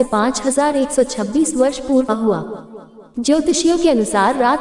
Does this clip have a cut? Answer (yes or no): yes